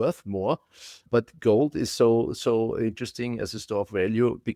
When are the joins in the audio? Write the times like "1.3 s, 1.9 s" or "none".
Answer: 1.0 s